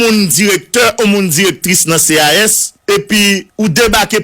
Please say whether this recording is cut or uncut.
cut